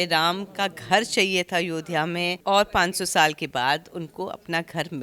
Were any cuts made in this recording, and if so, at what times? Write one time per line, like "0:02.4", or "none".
0:02.4